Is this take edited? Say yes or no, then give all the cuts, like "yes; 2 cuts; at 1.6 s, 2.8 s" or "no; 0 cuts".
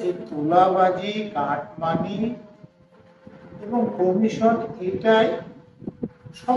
no; 0 cuts